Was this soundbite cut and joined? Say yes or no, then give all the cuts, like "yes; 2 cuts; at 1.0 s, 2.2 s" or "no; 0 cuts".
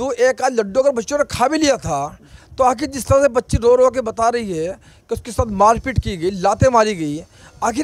no; 0 cuts